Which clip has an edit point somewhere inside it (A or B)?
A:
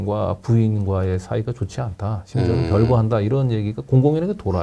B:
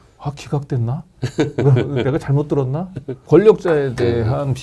B